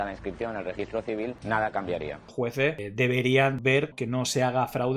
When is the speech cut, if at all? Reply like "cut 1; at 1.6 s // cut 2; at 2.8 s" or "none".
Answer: cut 1; at 1.4 s // cut 2; at 2.3 s // cut 3; at 3.6 s